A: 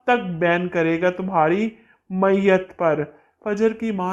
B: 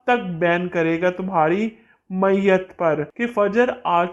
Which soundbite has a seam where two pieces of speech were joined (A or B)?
B